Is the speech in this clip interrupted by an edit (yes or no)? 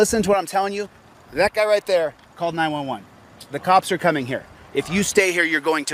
no